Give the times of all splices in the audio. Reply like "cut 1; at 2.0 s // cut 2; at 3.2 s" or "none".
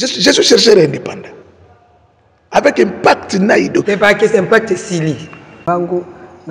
cut 1; at 5.5 s